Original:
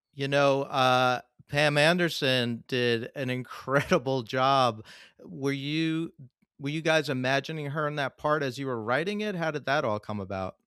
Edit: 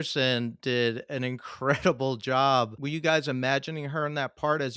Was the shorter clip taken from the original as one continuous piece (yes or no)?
no